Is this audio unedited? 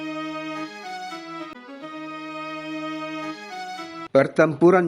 no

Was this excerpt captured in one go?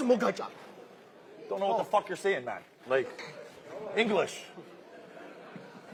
yes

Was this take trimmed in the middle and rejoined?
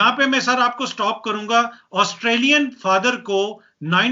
no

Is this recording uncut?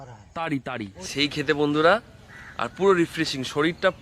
no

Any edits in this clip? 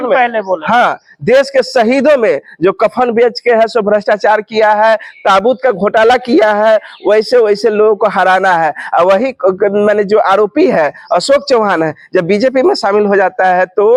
no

